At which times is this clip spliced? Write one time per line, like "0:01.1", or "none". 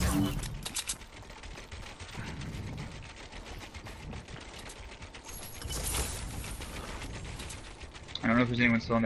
none